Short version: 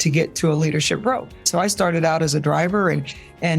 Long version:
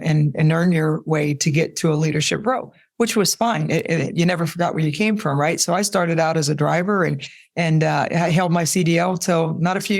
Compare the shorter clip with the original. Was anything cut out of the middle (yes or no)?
yes